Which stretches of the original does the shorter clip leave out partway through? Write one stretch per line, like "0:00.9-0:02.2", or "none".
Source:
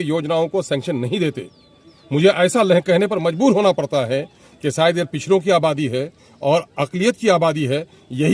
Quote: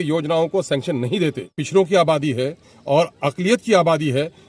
0:01.6-0:05.2